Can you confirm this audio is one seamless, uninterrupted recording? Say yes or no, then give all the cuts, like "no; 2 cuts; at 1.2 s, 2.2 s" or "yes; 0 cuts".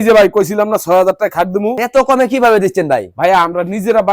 no; 1 cut; at 1.8 s